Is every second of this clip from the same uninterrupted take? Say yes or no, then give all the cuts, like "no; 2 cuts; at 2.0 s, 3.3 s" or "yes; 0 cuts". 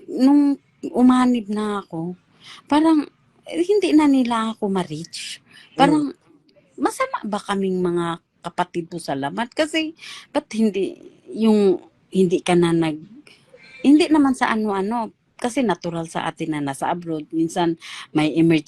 yes; 0 cuts